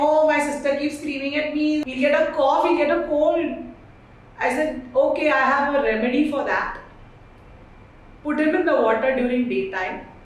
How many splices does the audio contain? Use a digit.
0